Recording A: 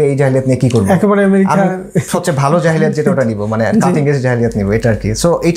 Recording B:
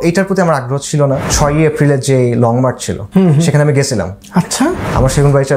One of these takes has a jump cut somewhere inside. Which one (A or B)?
B